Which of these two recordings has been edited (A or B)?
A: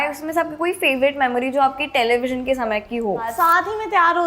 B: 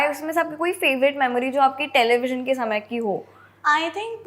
A